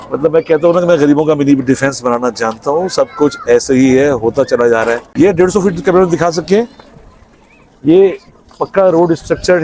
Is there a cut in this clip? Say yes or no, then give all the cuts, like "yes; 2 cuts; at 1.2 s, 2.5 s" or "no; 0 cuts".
yes; 1 cut; at 5.0 s